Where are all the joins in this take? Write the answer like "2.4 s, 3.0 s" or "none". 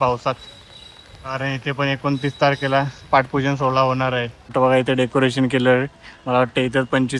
4.5 s